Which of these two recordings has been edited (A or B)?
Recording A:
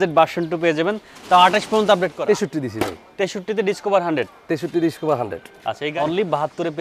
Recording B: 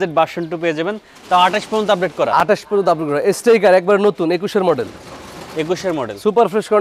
A